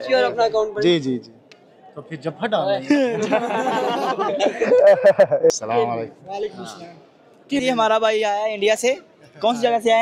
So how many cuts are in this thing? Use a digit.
2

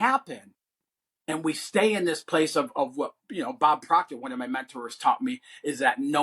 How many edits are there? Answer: 0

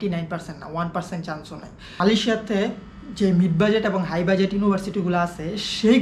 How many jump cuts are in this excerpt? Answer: 1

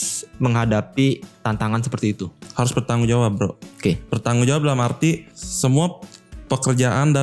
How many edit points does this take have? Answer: 1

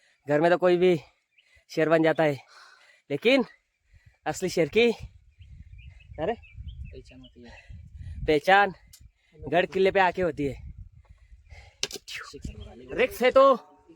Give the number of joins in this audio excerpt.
1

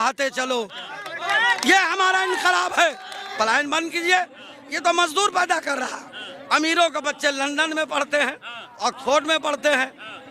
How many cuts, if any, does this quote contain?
1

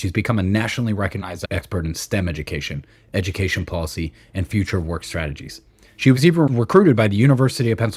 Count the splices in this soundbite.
2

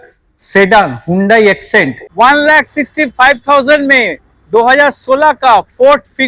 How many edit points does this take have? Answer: 1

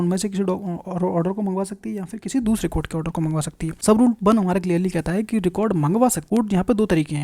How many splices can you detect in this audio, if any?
2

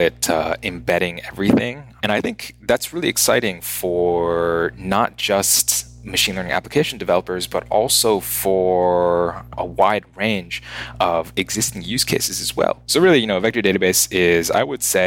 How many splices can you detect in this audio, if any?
2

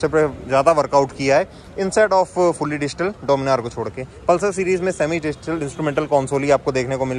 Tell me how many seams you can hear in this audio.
0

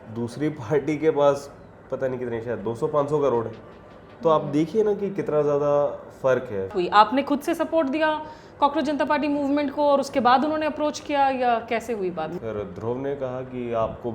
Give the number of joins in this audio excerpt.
2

